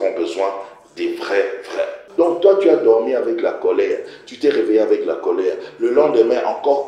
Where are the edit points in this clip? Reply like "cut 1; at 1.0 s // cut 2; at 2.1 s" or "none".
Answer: cut 1; at 2.0 s